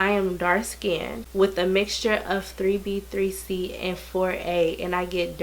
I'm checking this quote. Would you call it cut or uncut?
cut